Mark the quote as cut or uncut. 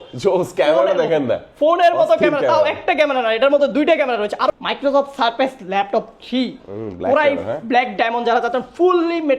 cut